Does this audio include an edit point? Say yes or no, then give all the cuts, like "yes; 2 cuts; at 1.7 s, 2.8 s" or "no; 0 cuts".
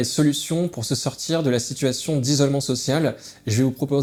no; 0 cuts